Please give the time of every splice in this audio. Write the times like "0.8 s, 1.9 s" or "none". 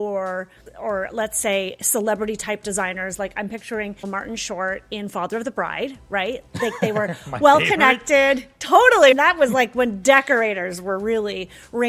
none